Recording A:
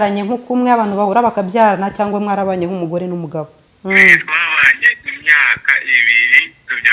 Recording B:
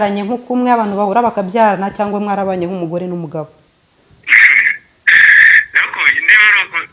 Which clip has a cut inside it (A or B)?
A